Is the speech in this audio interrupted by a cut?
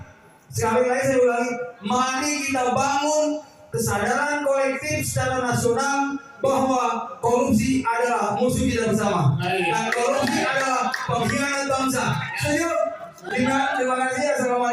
no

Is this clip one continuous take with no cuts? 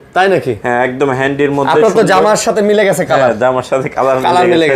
yes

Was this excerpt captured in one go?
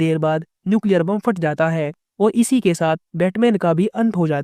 yes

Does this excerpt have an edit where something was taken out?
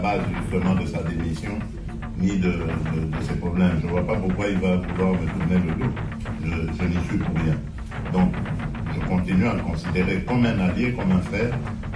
no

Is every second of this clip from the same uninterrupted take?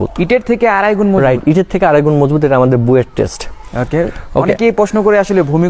yes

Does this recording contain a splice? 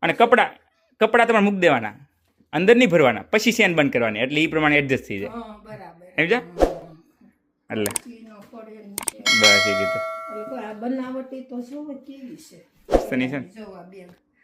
no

